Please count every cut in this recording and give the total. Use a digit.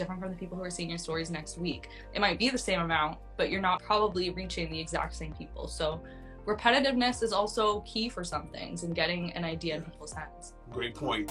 1